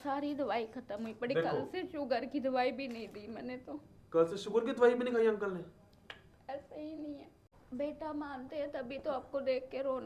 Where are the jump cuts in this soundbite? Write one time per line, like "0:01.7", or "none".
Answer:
0:07.5